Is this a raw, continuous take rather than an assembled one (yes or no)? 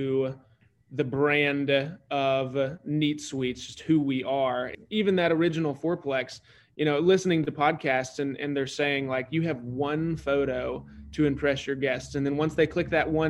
no